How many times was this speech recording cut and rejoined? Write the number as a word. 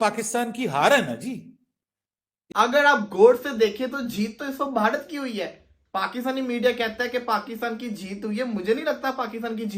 one